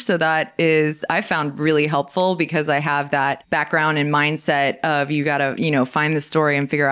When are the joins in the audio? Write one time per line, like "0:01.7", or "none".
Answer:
0:03.4